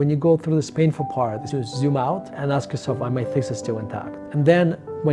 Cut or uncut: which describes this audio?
cut